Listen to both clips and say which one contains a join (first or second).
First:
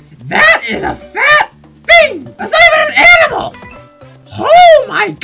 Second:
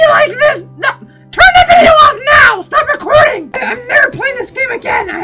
second